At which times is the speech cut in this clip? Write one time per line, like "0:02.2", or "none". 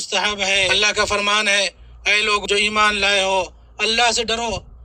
0:00.7
0:02.4